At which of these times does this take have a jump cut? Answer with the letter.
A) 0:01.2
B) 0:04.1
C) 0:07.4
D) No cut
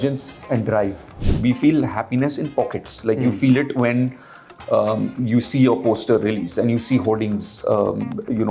A